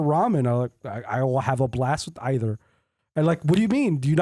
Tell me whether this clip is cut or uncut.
uncut